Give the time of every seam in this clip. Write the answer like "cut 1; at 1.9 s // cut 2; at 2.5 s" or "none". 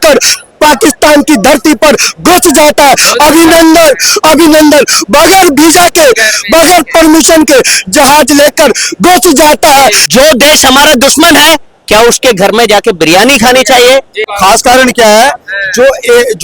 cut 1; at 10.0 s // cut 2; at 14.2 s